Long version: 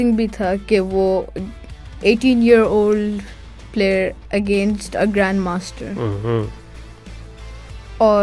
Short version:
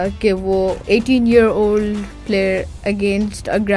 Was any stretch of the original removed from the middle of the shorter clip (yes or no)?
yes